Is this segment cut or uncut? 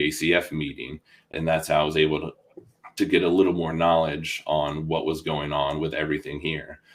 cut